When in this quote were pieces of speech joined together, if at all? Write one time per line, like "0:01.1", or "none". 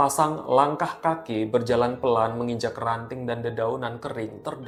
none

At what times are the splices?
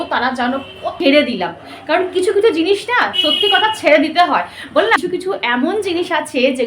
0:00.9
0:05.0

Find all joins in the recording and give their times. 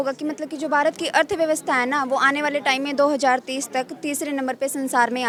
none

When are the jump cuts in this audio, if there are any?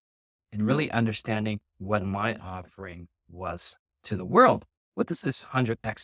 none

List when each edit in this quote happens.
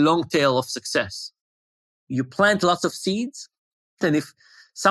0:01.8
0:04.1

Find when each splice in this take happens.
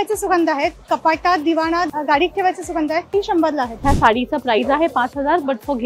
0:01.9
0:03.4

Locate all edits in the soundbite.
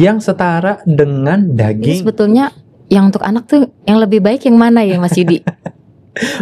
0:02.0

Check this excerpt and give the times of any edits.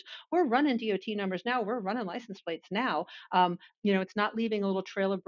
0:03.6

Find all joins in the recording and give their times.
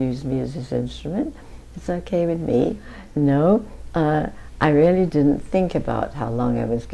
0:03.0

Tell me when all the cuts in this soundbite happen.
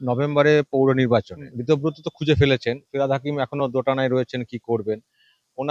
0:01.5

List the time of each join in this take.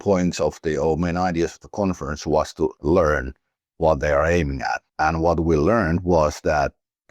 0:02.8
0:04.8

